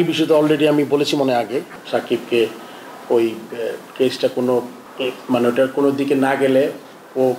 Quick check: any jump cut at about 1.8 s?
yes; 2 cuts; at 1.8 s, 4.8 s

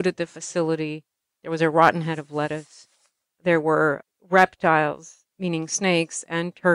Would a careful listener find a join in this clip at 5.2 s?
yes; 2 cuts; at 4.1 s, 5.2 s

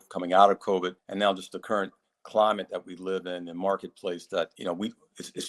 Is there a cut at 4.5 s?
yes; 2 cuts; at 1.0 s, 4.5 s

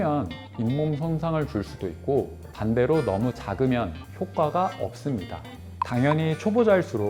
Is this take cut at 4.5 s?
no; 2 cuts; at 2.4 s, 5.9 s

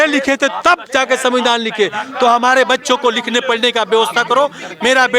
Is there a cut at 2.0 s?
no; 0 cuts

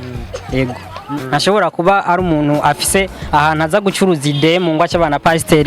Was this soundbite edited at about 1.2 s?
yes; 1 cut; at 1.2 s

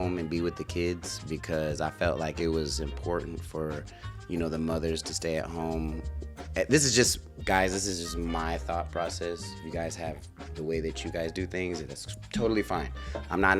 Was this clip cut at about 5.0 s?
no; 0 cuts

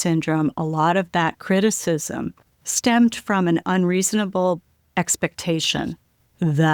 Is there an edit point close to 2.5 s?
yes; 1 cut; at 2.5 s

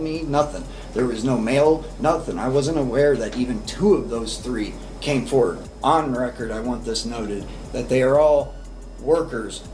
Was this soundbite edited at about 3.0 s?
no; 1 cut; at 5.6 s

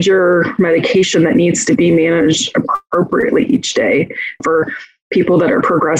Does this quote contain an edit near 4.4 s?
yes; 1 cut; at 4.4 s

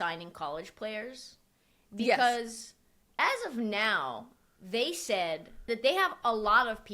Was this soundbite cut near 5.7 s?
yes; 1 cut; at 5.7 s

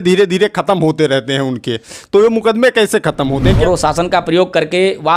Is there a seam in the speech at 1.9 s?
no; 1 cut; at 3.6 s

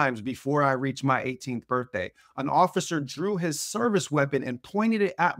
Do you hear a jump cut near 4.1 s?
no; 0 cuts

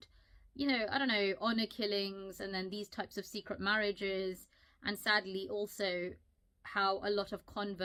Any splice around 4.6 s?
no; 0 cuts

